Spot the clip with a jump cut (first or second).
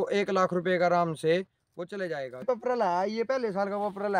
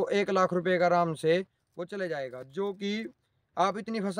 first